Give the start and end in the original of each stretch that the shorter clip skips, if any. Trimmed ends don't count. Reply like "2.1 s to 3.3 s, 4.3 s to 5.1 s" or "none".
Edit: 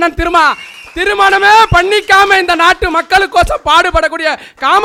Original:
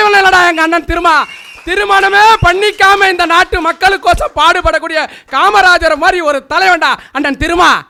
none